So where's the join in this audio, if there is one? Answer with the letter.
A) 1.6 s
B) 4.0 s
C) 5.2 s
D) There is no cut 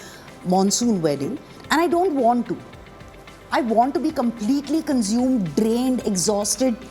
A